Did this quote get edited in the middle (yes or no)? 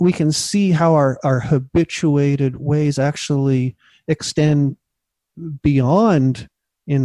no